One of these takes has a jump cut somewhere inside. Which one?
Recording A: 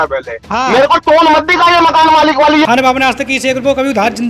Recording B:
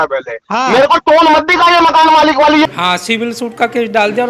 A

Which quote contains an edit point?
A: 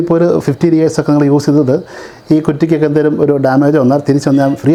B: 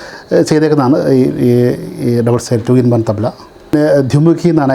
B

